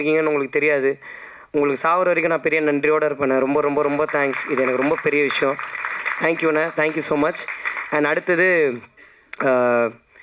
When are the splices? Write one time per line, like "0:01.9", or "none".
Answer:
none